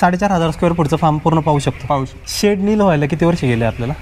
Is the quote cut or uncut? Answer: cut